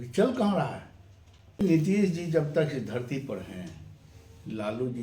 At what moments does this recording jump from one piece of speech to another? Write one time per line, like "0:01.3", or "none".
0:01.6